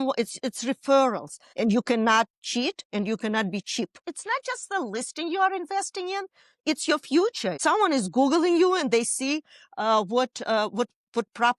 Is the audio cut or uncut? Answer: cut